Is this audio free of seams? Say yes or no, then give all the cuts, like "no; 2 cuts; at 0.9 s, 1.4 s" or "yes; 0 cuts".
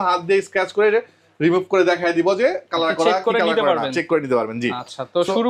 yes; 0 cuts